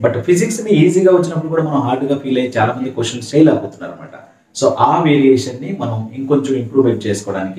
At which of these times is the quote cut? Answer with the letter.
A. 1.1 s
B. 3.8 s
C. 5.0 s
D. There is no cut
D